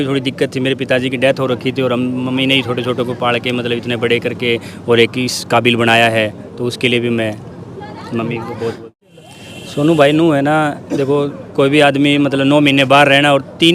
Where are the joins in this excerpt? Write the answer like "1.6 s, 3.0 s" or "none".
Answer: 9.0 s

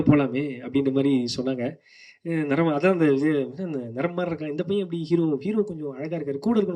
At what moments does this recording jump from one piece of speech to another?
none

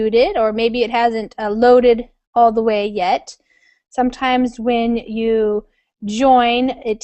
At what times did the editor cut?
4.5 s

